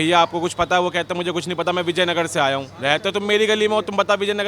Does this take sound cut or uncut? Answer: uncut